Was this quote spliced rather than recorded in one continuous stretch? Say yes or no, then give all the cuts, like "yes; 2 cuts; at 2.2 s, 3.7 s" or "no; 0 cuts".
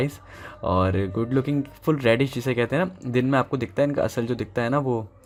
no; 0 cuts